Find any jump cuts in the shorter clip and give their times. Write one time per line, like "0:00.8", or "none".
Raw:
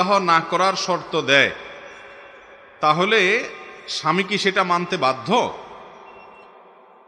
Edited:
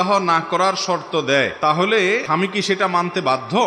0:01.5
0:02.2